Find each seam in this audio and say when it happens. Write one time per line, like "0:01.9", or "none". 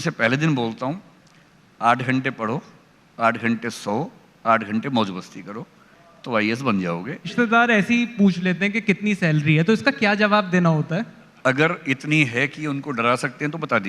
0:07.3
0:11.2